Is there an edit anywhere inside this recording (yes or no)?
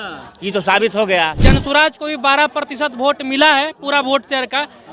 yes